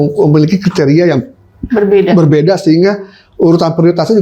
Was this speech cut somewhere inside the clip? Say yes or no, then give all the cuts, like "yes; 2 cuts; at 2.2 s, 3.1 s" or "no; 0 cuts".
no; 0 cuts